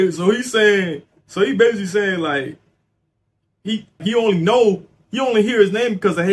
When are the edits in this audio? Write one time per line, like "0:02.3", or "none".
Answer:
0:04.0

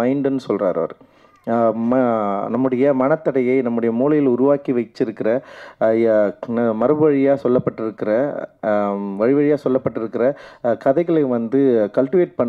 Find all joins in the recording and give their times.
none

